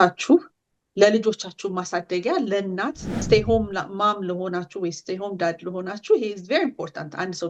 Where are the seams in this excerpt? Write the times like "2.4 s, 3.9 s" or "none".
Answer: 3.2 s